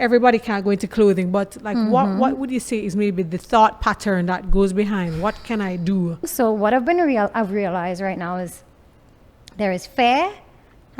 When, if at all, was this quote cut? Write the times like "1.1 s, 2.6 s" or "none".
6.3 s